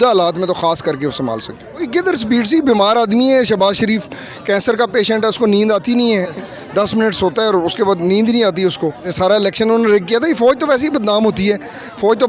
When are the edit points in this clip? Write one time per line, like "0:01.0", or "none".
0:01.9
0:06.4
0:09.1